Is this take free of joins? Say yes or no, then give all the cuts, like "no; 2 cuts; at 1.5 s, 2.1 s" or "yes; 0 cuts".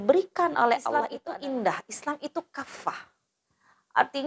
no; 1 cut; at 1.2 s